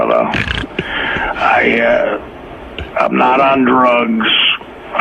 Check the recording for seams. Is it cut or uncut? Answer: uncut